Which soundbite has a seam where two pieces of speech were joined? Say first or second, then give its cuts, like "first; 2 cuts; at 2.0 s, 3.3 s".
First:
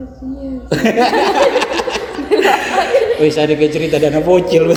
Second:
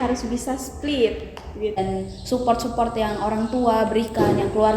second; 1 cut; at 1.7 s